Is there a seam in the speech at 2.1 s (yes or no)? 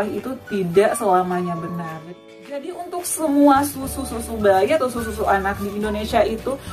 yes